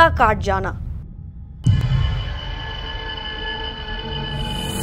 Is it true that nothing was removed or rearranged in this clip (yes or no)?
no